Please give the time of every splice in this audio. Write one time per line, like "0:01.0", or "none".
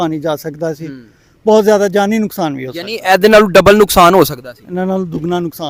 none